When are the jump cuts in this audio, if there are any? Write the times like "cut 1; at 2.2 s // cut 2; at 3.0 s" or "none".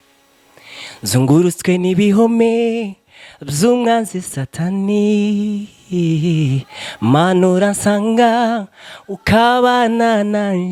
none